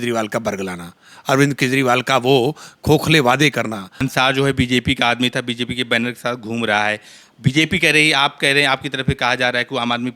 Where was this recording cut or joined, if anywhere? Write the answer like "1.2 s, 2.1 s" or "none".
4.1 s